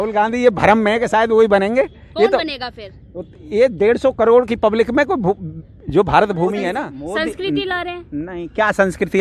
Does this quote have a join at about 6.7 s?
yes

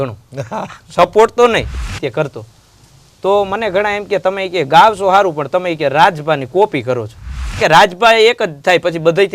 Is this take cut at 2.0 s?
yes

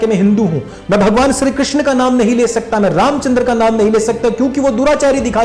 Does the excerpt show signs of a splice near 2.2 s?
no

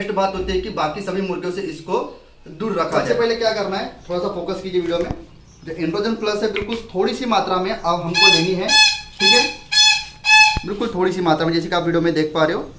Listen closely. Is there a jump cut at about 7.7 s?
no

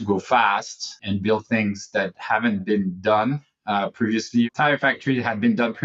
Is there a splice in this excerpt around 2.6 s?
no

